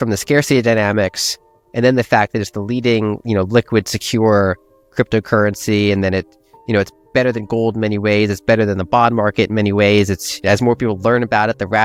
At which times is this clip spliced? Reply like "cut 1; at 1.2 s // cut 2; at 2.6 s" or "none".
none